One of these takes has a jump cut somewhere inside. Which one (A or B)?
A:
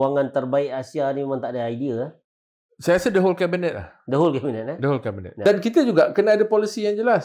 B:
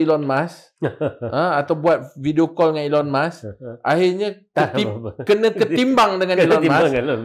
A